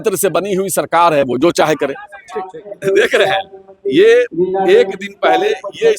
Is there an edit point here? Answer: yes; 1 cut; at 2.6 s

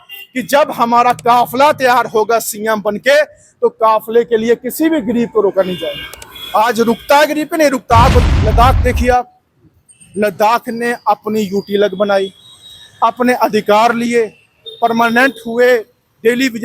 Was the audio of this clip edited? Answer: yes; 1 cut; at 8.2 s

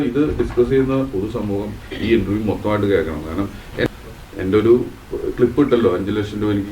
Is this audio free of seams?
no; 1 cut; at 3.9 s

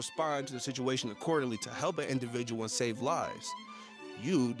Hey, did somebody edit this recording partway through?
no; 0 cuts

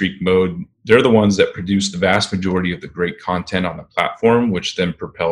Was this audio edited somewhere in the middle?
no; 0 cuts

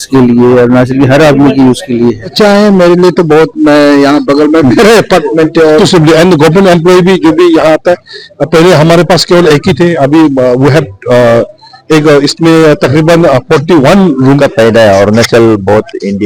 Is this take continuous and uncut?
no; 3 cuts; at 2.3 s, 5.8 s, 14.2 s

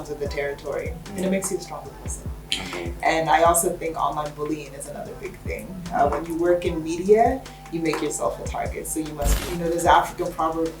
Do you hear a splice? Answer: yes; 1 cut; at 9.4 s

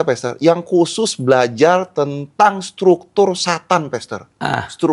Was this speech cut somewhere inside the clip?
no; 0 cuts

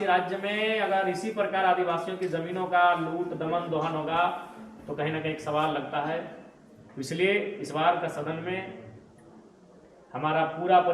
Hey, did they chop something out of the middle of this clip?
no; 0 cuts

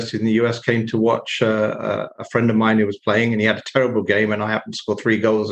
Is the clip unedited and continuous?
yes; 0 cuts

